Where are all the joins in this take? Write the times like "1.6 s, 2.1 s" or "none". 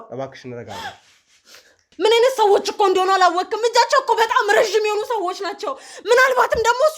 1.9 s